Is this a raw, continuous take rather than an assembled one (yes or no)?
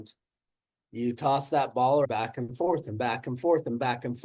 no